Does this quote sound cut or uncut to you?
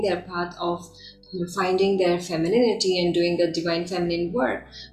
uncut